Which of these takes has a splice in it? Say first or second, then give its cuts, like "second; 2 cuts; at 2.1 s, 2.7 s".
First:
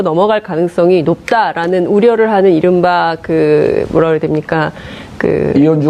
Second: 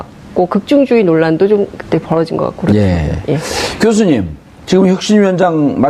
second; 1 cut; at 4.5 s